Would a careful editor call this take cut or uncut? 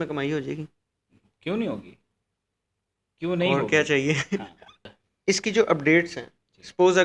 cut